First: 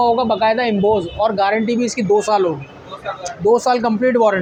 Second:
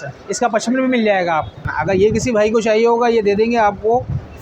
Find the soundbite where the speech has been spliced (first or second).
second